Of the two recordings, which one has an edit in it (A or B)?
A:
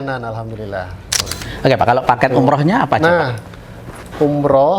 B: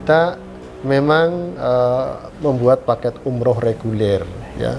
A